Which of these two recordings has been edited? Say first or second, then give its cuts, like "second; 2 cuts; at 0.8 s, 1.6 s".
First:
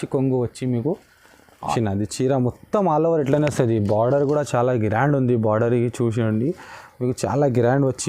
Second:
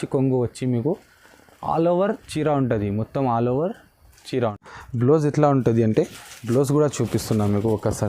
first; 1 cut; at 1.7 s